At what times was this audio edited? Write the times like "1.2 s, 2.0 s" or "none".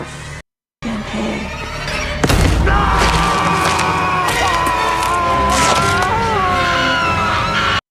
none